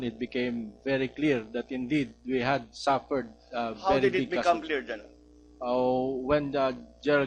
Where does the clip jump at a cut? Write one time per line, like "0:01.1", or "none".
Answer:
0:01.7